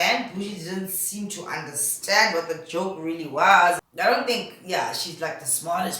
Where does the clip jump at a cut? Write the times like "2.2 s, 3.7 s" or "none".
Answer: 3.9 s